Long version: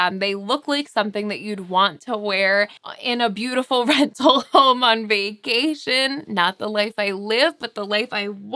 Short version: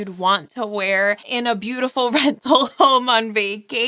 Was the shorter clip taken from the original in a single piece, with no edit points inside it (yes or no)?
no